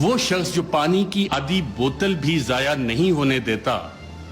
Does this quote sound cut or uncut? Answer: cut